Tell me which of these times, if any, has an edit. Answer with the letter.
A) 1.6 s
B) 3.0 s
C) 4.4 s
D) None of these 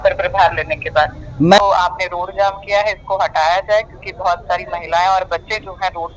A